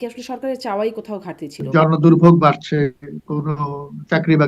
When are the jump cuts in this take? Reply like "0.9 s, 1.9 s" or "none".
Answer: 1.6 s